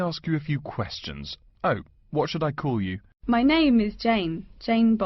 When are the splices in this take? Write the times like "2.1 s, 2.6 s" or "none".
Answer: 3.1 s